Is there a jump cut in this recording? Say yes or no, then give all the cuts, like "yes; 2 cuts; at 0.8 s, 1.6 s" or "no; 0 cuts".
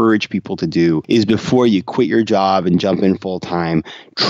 yes; 1 cut; at 1.0 s